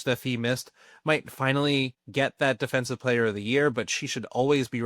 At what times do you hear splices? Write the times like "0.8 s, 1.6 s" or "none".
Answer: 2.0 s

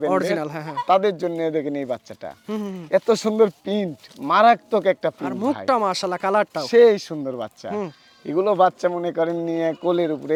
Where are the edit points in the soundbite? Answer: none

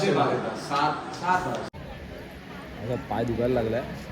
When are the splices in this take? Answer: 1.7 s

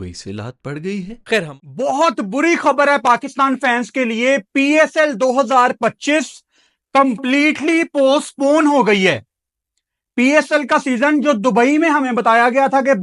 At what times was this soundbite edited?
1.6 s

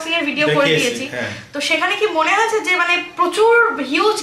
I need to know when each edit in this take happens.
none

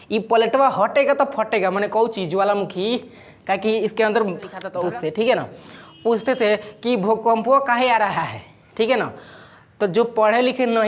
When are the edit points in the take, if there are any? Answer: 4.6 s

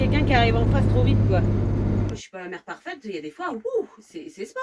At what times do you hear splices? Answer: 2.2 s

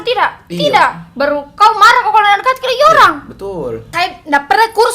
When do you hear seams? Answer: 3.8 s

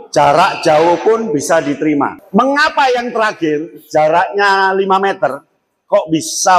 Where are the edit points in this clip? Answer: 2.2 s

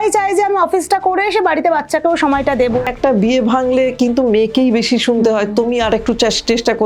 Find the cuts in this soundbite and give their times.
2.8 s

